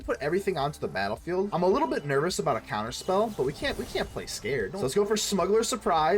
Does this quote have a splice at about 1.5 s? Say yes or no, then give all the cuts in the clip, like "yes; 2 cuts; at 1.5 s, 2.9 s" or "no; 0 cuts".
yes; 2 cuts; at 1.5 s, 4.8 s